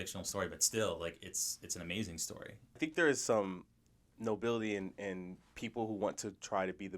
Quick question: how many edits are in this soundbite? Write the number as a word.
one